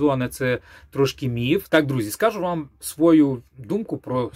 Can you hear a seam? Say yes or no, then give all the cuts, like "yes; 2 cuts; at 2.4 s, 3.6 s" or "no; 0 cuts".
yes; 1 cut; at 1.7 s